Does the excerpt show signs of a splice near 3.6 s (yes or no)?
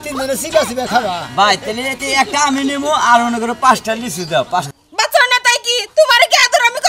no